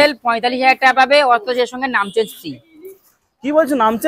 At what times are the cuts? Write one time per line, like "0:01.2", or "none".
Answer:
none